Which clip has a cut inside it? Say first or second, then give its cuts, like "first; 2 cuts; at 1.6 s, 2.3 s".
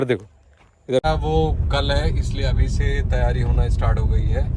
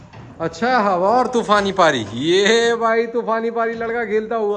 first; 1 cut; at 1.0 s